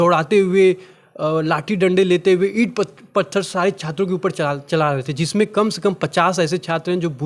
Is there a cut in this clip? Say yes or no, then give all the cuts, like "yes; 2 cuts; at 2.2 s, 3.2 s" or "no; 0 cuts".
no; 0 cuts